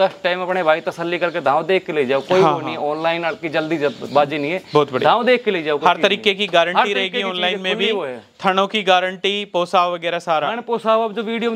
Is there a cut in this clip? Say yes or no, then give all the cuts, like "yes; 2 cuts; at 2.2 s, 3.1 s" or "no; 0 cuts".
no; 0 cuts